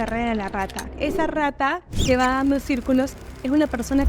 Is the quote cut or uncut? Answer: cut